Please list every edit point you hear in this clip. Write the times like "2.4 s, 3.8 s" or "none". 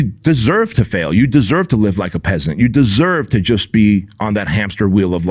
none